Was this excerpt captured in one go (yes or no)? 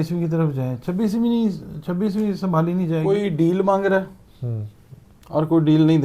no